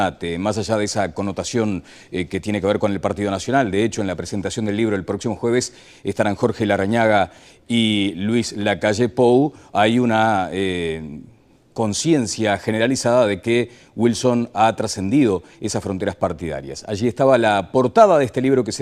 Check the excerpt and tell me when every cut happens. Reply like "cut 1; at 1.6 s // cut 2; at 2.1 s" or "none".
cut 1; at 14.9 s